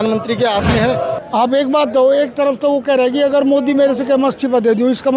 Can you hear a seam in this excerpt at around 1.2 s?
yes; 1 cut; at 1.2 s

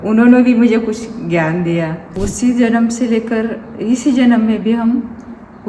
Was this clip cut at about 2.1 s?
yes; 1 cut; at 2.1 s

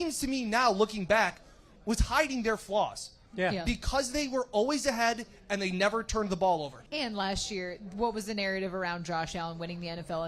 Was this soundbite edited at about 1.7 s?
yes; 2 cuts; at 1.7 s, 6.8 s

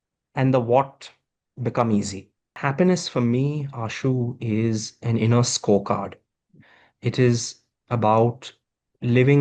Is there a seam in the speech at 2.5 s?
yes; 1 cut; at 2.5 s

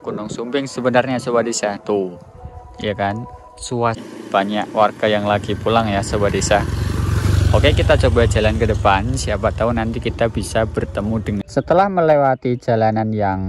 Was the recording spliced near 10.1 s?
no; 2 cuts; at 4.0 s, 11.4 s

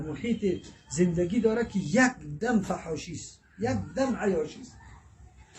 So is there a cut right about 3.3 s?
no; 0 cuts

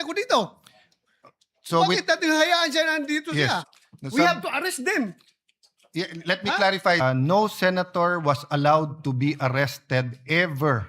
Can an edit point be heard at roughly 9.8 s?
no; 2 cuts; at 3.7 s, 7.0 s

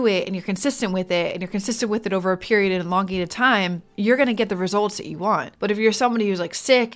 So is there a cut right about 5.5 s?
yes; 2 cuts; at 3.8 s, 5.5 s

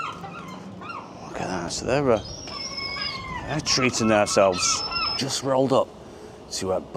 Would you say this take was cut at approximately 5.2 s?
yes; 1 cut; at 5.2 s

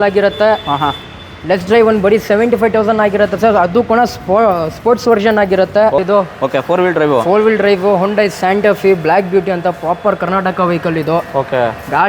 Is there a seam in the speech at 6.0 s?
yes; 1 cut; at 6.0 s

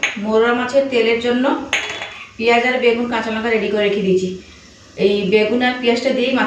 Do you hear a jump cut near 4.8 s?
no; 0 cuts

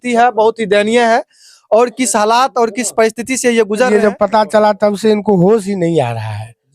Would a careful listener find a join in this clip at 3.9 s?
yes; 1 cut; at 3.9 s

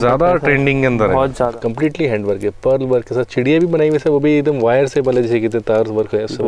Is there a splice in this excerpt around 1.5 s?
yes; 1 cut; at 1.5 s

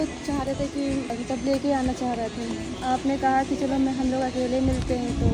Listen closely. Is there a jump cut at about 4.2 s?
no; 2 cuts; at 1.1 s, 2.7 s

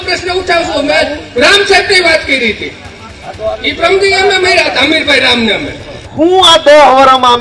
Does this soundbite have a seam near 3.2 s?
no; 1 cut; at 6.1 s

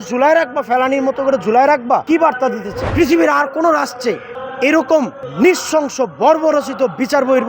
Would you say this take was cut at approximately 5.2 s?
yes; 2 cuts; at 2.3 s, 5.2 s

